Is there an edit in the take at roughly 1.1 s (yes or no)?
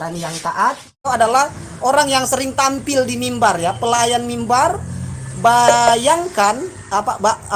yes